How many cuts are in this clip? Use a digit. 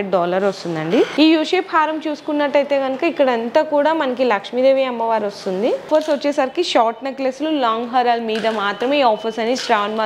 2